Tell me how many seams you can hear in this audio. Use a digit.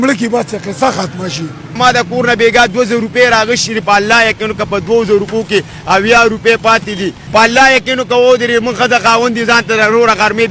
2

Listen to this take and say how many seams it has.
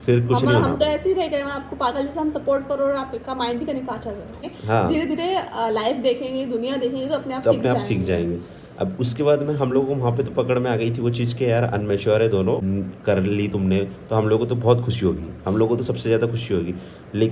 2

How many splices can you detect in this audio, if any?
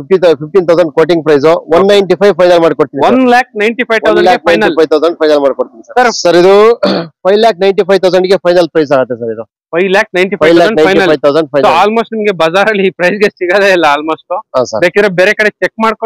1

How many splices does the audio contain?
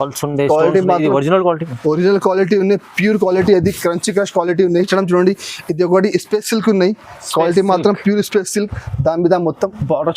1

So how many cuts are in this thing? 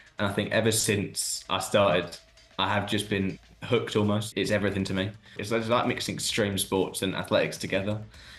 2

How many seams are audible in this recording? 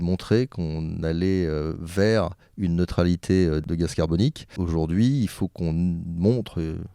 2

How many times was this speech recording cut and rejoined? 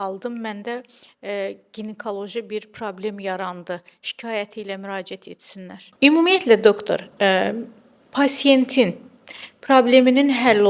1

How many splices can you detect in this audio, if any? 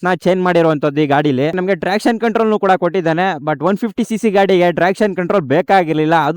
1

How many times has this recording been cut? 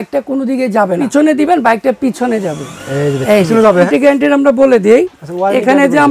2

